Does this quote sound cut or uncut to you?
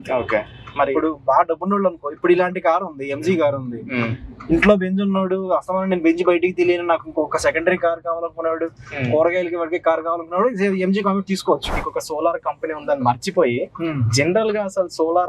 cut